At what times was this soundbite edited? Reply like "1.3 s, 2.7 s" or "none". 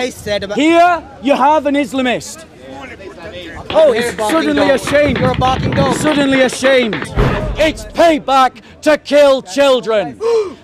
7.4 s